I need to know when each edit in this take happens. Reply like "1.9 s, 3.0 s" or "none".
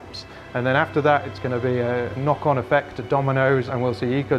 2.1 s, 3.7 s